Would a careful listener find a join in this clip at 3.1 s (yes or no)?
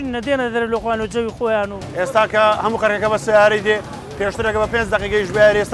no